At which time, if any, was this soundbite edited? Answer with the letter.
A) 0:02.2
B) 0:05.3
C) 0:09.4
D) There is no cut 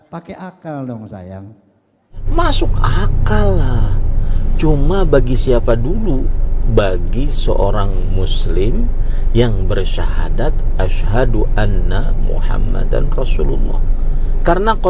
A